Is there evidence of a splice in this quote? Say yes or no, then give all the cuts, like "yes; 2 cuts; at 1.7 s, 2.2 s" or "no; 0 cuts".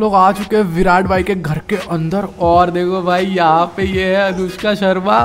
no; 0 cuts